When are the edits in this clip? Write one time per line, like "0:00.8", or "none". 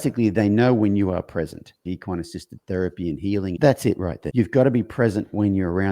0:01.9
0:03.6
0:04.2